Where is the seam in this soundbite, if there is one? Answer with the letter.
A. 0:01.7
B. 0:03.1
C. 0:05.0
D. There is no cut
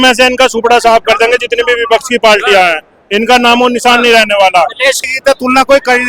C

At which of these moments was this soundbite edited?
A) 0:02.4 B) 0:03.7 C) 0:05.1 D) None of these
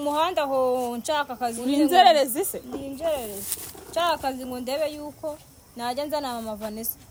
D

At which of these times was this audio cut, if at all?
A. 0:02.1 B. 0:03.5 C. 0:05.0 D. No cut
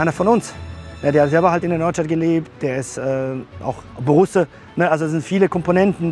B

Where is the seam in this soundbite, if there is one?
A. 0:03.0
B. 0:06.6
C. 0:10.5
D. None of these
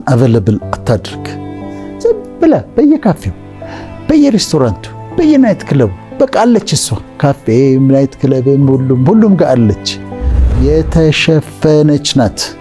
C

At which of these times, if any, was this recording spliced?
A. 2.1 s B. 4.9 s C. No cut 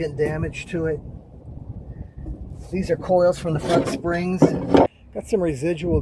B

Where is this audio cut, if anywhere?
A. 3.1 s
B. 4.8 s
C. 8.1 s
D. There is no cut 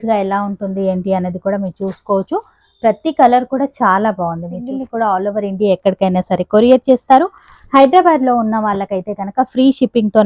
B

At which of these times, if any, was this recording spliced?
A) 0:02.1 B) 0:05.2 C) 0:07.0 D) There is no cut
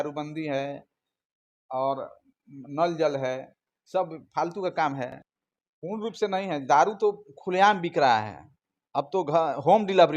B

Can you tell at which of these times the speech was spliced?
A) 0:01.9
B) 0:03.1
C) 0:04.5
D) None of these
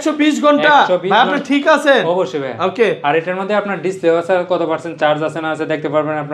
D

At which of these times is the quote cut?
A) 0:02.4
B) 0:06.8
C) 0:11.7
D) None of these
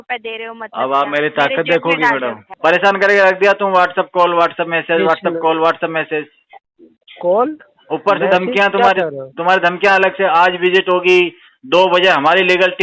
A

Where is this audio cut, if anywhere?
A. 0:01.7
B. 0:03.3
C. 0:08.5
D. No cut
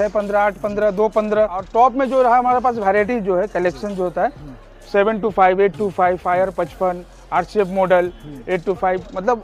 A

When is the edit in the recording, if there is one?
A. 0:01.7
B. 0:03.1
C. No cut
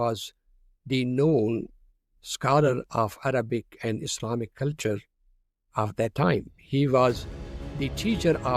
C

